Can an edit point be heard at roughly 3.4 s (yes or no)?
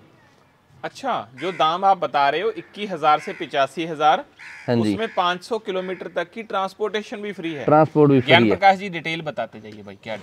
no